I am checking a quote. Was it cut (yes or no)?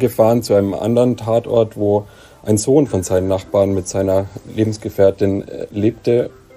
no